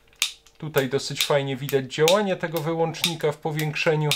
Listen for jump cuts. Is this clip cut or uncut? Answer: uncut